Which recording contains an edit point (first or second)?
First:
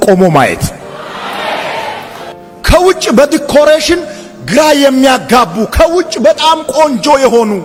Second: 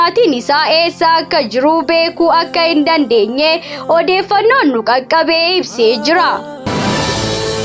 second